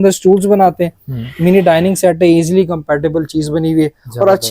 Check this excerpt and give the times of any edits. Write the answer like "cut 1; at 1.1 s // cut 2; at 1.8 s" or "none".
none